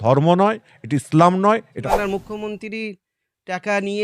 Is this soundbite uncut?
no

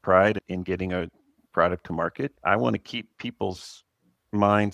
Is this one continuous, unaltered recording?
no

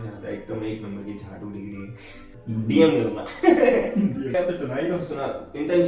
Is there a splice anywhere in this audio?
yes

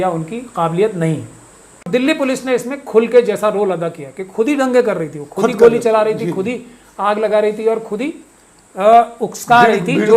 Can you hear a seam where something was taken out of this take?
yes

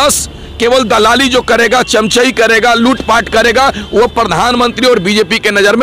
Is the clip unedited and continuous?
yes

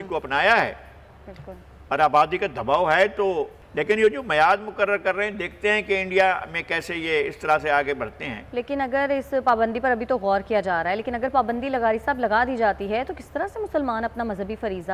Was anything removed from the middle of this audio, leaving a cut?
no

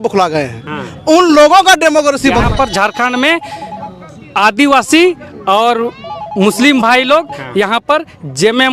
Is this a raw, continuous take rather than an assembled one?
no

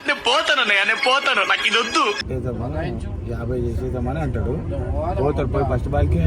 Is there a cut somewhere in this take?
yes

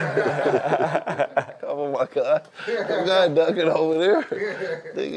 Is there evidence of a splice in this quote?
no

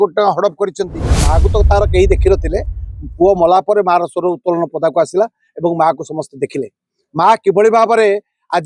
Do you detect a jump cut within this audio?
yes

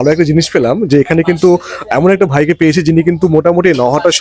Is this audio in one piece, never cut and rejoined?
yes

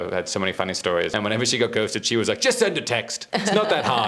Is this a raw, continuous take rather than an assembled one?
no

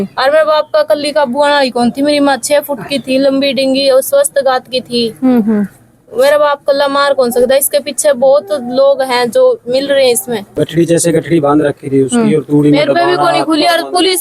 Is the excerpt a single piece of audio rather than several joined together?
no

